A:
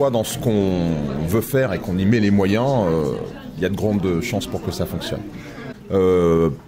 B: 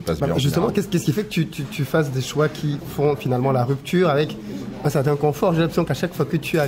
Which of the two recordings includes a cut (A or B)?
A